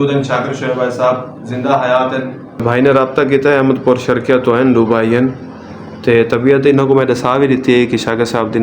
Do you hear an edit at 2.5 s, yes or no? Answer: yes